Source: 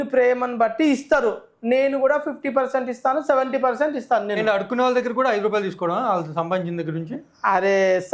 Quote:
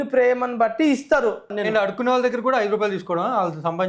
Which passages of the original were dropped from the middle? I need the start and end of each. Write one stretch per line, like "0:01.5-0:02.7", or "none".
0:01.6-0:04.3